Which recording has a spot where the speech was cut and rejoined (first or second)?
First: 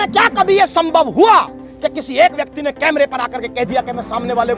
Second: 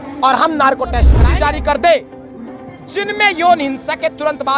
second